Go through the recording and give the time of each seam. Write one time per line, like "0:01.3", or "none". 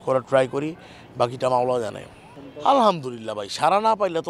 none